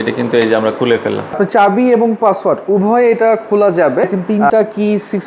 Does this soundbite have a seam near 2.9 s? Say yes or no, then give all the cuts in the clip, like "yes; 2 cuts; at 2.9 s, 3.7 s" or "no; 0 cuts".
no; 2 cuts; at 1.4 s, 4.3 s